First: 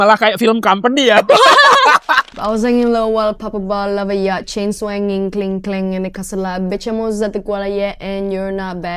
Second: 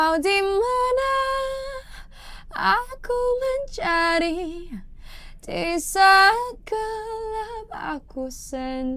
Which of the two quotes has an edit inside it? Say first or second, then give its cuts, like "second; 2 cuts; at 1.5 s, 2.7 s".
first; 1 cut; at 2.3 s